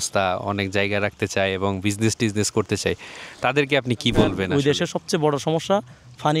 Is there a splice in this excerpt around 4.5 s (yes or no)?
yes